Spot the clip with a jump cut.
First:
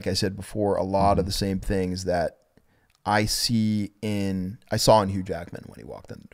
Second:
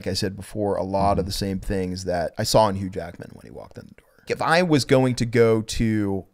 second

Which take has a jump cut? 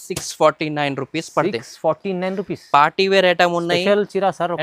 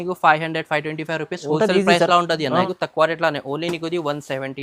second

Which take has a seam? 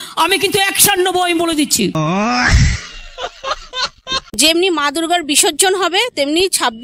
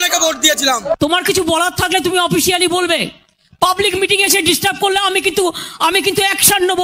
first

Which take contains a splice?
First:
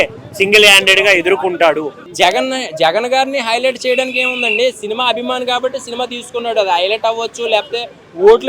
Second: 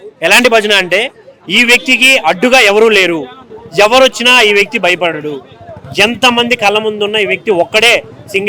first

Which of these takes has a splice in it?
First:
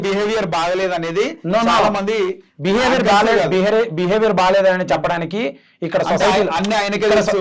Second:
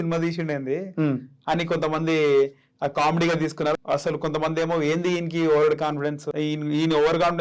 second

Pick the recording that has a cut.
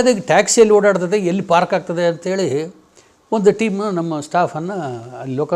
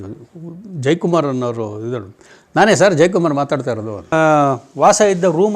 second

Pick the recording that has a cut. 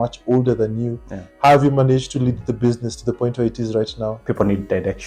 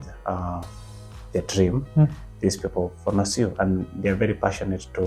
first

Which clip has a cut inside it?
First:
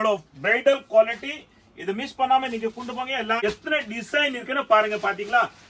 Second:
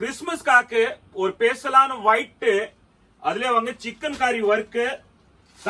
first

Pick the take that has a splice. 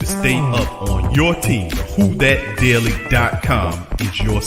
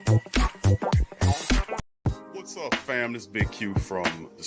second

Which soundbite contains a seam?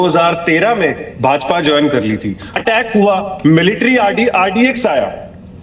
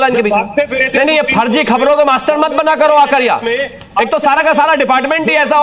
first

